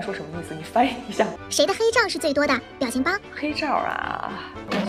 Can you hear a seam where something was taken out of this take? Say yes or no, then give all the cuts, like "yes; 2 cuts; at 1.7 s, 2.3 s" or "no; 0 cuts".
yes; 1 cut; at 1.4 s